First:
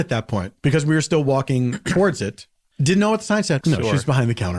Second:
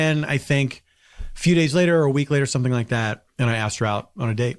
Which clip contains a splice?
first; 2 cuts; at 2.7 s, 3.6 s

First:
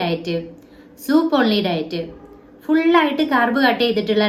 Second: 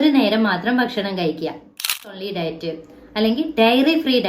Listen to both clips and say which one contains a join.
second; 1 cut; at 2.2 s

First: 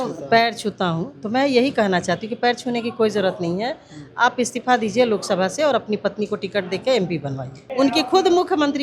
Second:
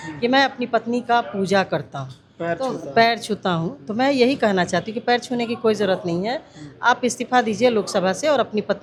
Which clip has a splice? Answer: first; 1 cut; at 7.6 s

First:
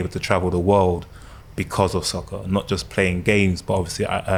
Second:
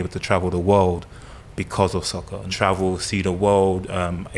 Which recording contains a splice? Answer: second; 1 cut; at 2.4 s

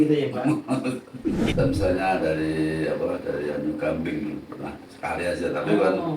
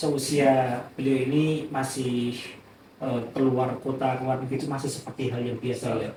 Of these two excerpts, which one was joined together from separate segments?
first; 1 cut; at 1.5 s

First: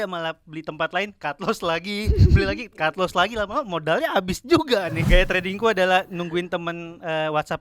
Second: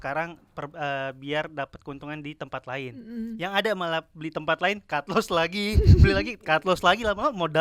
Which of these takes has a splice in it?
first; 1 cut; at 5.0 s

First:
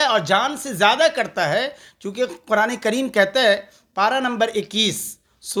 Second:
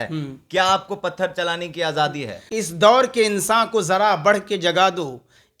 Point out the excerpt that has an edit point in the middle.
second; 1 cut; at 2.3 s

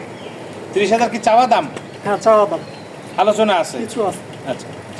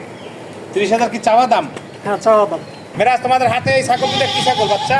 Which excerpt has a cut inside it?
second; 1 cut; at 2.8 s

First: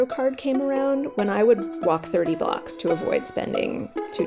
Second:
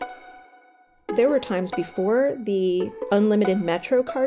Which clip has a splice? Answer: second; 2 cuts; at 1.1 s, 3.0 s

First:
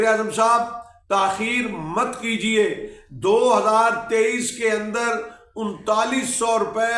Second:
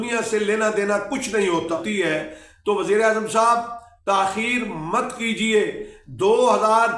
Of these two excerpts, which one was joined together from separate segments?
second; 1 cut; at 1.8 s

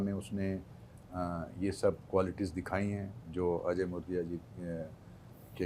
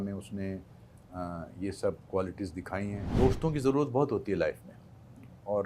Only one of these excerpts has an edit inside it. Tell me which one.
second; 1 cut; at 3.0 s

